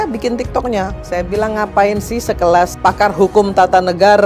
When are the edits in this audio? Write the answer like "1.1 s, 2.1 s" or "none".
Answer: 1.0 s, 2.7 s